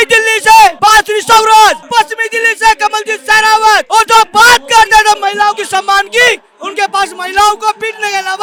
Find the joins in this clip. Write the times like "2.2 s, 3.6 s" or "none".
none